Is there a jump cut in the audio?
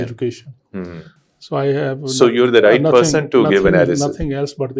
no; 0 cuts

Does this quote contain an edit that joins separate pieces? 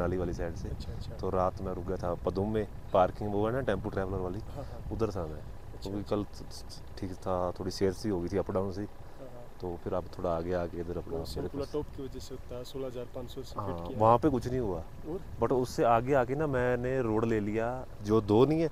no; 0 cuts

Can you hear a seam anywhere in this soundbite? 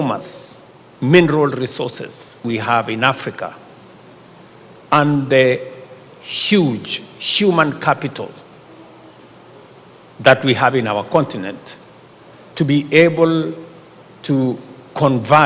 yes; 1 cut; at 2.4 s

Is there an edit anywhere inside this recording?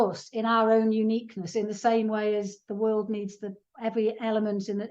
yes; 1 cut; at 3.6 s

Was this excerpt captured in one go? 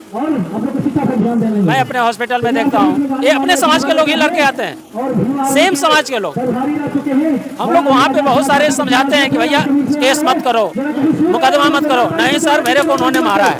yes; 0 cuts

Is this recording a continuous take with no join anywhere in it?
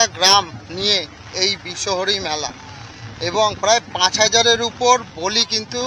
yes; 0 cuts

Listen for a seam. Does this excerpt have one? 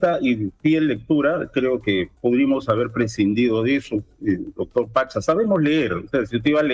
no; 0 cuts

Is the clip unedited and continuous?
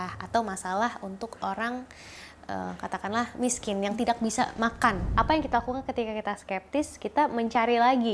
no; 1 cut; at 5.0 s

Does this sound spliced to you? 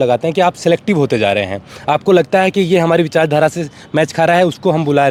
no; 0 cuts

